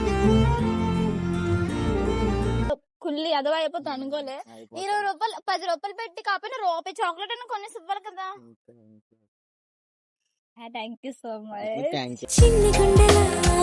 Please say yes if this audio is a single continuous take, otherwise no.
no